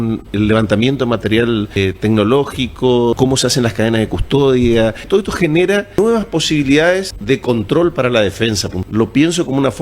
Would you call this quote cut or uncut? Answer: cut